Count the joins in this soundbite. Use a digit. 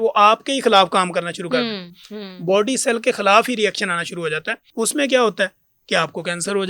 1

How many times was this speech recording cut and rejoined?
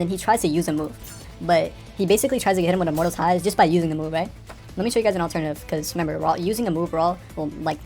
1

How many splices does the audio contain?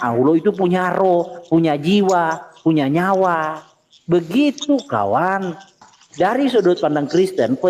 1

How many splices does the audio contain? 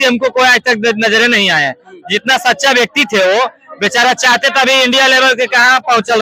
0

